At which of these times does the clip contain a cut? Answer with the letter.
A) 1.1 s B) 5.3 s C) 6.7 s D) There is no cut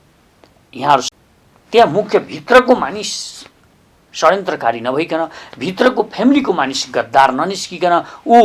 A